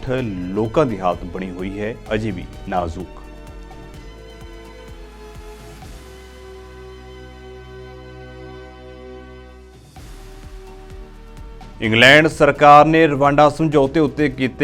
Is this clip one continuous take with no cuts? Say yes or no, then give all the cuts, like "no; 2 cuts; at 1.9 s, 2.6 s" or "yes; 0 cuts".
no; 1 cut; at 11.8 s